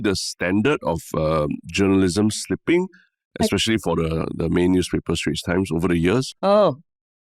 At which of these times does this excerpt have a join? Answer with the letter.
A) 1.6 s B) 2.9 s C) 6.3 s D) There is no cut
C